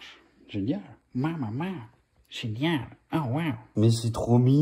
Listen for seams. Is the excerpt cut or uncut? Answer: cut